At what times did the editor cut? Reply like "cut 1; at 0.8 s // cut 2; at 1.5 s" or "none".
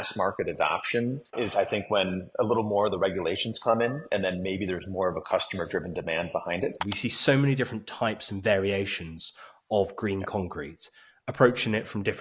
cut 1; at 1.2 s // cut 2; at 6.8 s